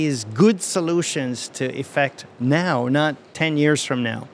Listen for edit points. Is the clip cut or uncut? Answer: cut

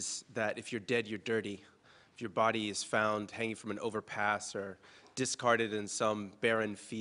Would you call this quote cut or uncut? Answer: uncut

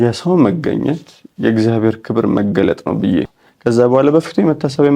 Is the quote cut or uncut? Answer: cut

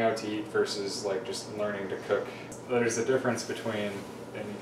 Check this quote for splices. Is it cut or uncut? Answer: cut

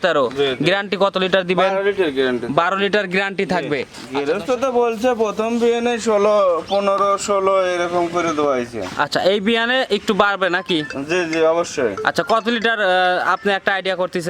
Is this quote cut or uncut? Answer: cut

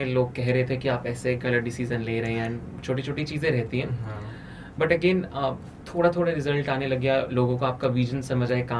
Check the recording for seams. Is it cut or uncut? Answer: uncut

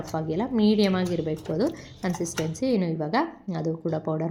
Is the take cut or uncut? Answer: uncut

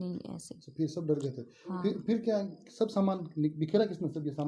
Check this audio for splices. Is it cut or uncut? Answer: uncut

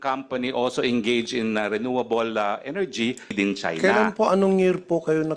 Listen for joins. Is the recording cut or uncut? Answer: cut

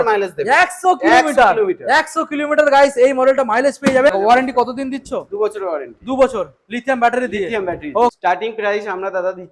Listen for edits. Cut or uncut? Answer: cut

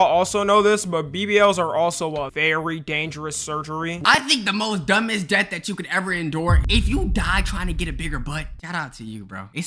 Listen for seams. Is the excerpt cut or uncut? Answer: cut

